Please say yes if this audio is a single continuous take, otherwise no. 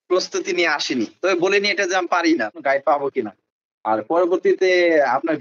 no